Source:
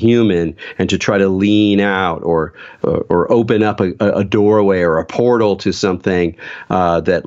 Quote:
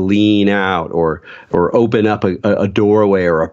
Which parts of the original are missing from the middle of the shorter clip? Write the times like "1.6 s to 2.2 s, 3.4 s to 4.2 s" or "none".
2.8 s to 3.0 s